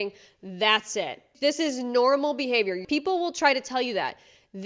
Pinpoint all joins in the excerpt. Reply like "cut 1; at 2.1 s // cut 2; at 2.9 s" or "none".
none